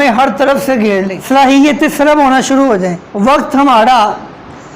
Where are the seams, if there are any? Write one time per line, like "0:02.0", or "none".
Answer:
0:01.2
0:03.0